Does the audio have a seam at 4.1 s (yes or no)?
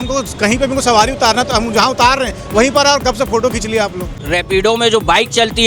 yes